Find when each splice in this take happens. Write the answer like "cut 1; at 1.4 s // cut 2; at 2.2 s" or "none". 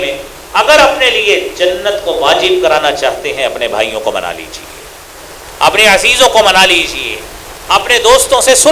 none